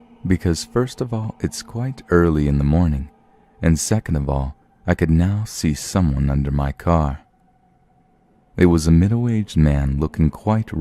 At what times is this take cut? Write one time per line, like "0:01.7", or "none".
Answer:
0:01.7